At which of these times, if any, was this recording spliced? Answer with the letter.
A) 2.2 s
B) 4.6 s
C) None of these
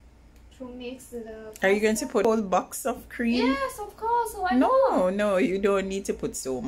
A